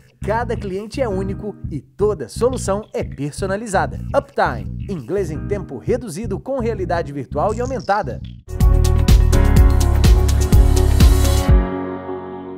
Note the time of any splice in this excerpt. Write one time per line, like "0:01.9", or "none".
0:08.7